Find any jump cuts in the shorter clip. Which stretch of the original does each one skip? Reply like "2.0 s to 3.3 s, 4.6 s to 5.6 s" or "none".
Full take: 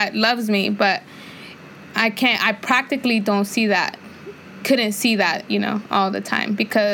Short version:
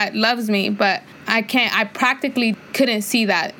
1.1 s to 1.8 s, 3.2 s to 4.5 s